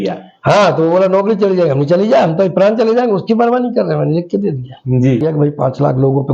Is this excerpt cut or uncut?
cut